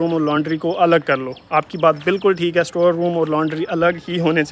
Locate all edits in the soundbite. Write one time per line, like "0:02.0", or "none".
none